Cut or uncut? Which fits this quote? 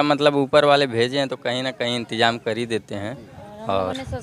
uncut